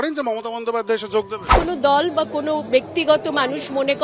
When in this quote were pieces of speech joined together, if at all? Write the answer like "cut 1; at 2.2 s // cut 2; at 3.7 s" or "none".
cut 1; at 1.5 s